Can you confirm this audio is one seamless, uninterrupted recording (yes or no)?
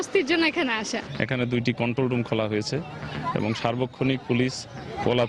no